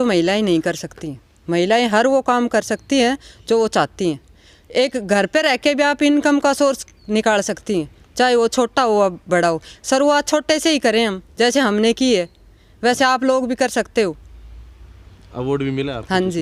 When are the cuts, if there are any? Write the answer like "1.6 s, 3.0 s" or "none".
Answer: none